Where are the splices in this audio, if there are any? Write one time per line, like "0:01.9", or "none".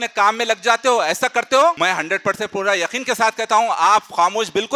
0:01.8